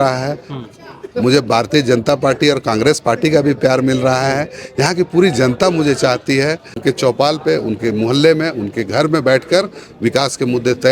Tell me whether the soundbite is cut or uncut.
cut